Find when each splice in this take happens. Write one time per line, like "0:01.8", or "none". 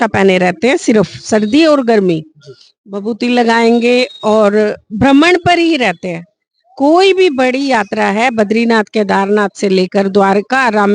none